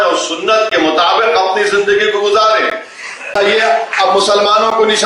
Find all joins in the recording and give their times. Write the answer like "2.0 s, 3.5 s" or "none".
3.4 s